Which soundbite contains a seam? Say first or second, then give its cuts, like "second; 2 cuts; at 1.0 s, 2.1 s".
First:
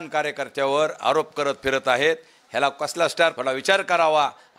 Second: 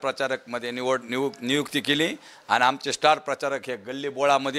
first; 1 cut; at 3.4 s